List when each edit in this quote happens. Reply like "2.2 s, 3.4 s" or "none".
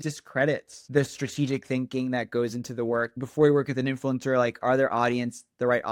none